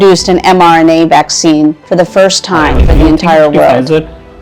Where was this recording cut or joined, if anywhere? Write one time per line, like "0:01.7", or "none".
0:02.9

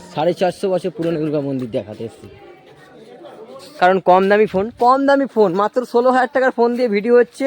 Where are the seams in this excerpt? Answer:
0:03.8

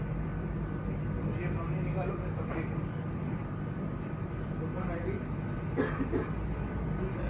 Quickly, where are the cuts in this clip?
none

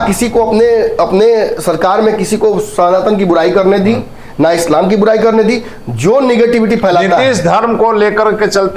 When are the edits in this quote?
none

